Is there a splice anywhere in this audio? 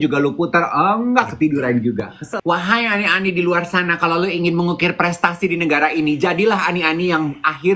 yes; 1 cut; at 2.2 s

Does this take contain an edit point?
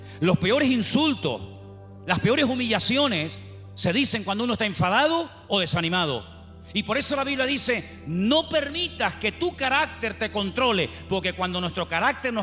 no; 0 cuts

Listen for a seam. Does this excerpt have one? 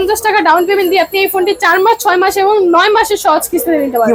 no; 0 cuts

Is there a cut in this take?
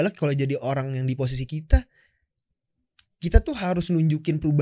no; 0 cuts

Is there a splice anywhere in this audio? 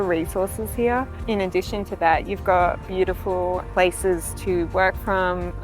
yes; 2 cuts; at 1.2 s, 3.7 s

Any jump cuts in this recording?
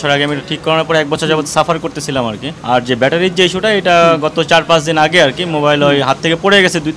no; 0 cuts

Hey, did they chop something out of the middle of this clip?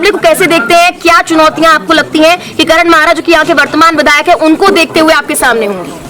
no; 0 cuts

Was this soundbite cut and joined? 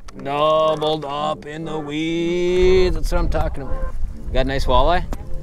no; 0 cuts

